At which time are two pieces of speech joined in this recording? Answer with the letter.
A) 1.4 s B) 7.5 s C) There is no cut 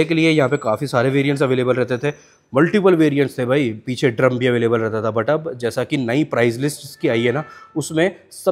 C